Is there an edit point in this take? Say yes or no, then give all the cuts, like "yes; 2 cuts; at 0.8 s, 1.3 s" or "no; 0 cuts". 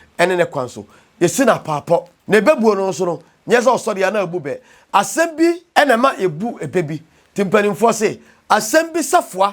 yes; 2 cuts; at 2.1 s, 5.6 s